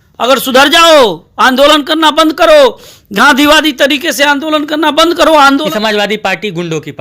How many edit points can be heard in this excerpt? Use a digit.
1